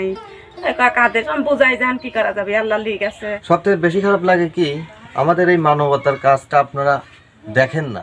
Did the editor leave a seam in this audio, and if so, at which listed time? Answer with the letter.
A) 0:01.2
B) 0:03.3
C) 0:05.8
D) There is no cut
B